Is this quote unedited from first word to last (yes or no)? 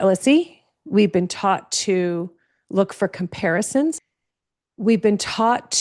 no